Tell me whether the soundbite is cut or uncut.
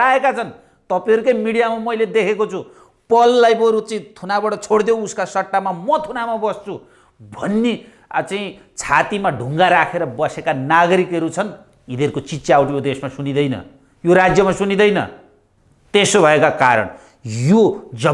uncut